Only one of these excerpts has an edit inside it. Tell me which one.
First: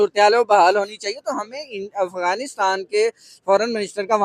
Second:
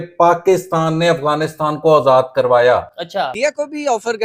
second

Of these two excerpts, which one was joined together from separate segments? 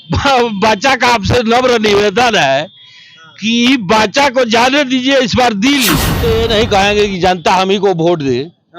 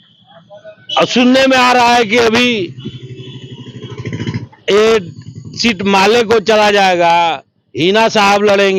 first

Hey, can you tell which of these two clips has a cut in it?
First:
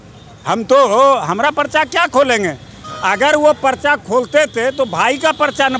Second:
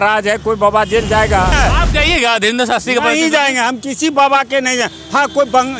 second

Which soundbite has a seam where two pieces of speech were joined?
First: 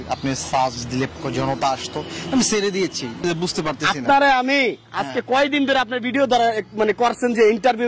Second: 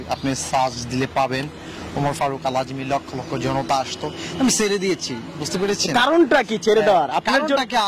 first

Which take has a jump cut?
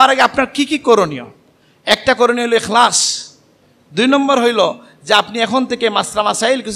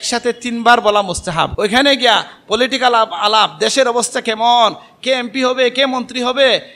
second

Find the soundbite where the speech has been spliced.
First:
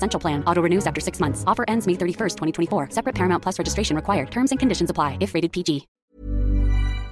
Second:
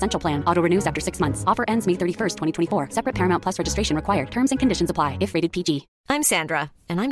first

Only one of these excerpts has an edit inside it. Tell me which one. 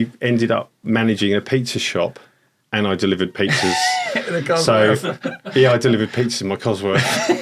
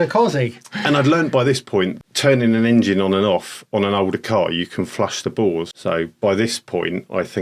second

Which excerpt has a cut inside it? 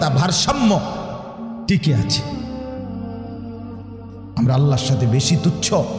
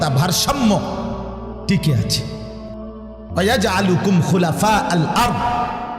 first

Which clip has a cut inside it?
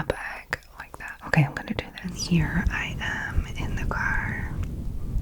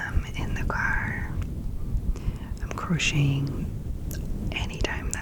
first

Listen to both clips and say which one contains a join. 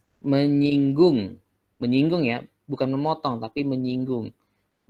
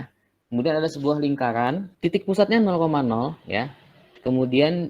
second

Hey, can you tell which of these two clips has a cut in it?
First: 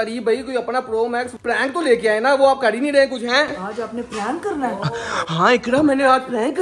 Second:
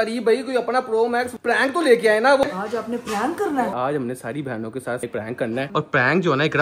second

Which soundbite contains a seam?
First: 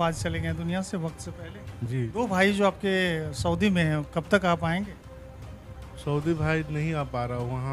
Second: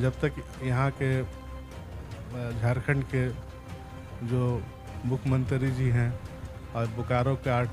first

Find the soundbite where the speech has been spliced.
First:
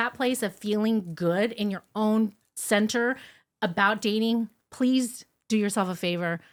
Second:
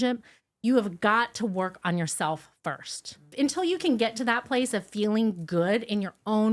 second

